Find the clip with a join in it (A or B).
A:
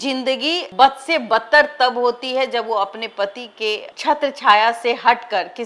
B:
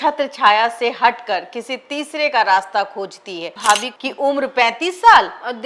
B